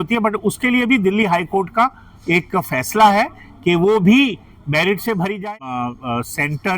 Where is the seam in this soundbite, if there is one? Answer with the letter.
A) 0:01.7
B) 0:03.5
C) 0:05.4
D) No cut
C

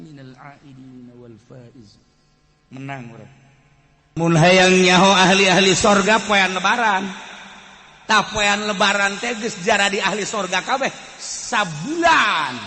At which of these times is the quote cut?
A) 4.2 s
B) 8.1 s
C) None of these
A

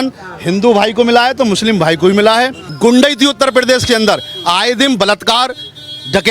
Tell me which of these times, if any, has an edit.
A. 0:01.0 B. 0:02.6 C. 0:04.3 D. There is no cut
B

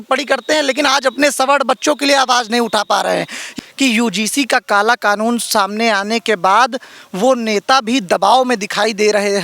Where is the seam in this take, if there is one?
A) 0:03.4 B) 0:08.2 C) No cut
A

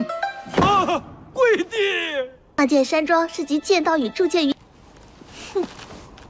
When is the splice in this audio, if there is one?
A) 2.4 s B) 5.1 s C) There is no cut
A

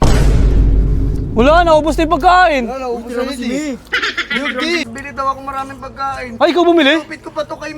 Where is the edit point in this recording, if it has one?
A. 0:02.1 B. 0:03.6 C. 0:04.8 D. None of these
C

